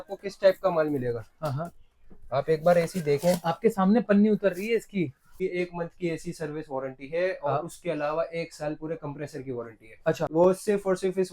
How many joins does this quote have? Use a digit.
2